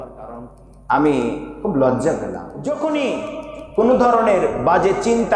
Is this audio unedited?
no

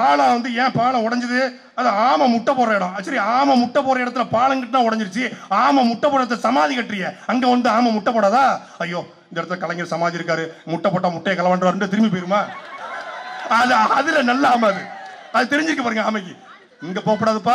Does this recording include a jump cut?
no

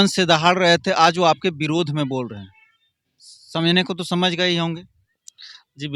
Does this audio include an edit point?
no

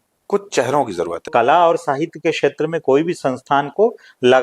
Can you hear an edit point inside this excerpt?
yes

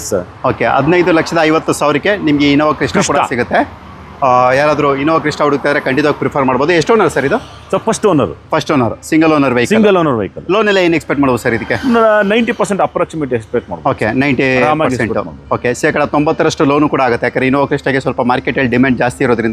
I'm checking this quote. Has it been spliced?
no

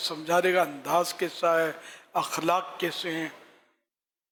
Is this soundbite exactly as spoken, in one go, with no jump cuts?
yes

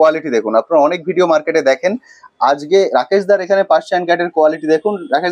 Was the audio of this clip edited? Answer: no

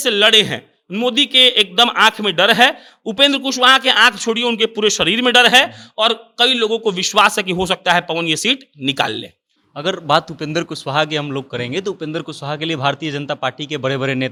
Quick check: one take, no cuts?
yes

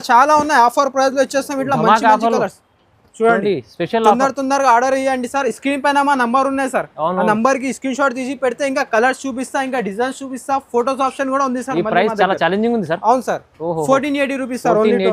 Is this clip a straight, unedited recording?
yes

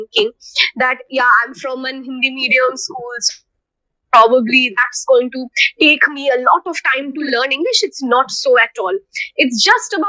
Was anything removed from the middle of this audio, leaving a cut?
no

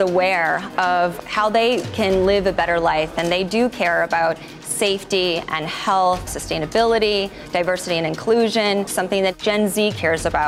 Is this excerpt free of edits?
no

